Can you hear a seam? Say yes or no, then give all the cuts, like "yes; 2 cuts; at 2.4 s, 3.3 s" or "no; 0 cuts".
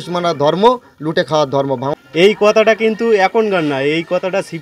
yes; 1 cut; at 1.9 s